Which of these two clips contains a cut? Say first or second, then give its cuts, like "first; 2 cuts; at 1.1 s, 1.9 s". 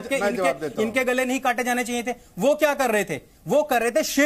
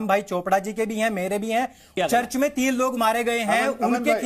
second; 1 cut; at 1.9 s